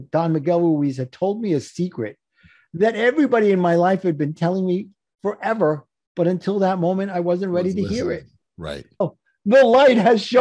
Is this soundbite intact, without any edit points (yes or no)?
no